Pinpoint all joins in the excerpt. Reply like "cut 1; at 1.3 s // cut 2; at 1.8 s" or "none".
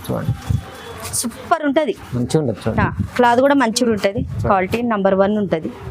cut 1; at 3.8 s